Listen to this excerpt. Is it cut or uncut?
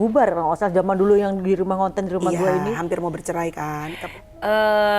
cut